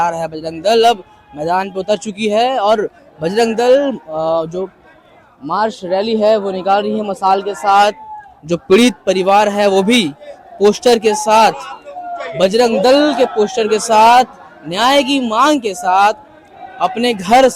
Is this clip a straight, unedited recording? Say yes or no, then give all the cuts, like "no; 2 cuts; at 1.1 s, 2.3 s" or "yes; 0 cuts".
yes; 0 cuts